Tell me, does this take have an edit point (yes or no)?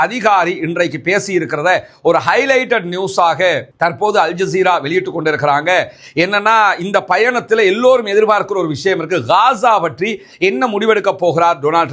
no